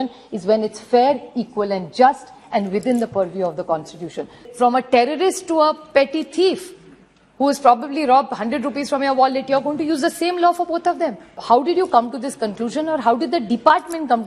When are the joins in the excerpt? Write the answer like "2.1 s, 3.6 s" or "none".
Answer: 4.4 s, 11.4 s